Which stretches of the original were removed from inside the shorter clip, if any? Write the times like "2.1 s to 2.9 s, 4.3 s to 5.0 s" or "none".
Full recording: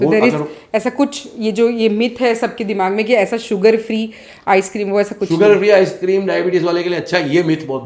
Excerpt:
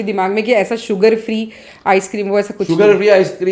none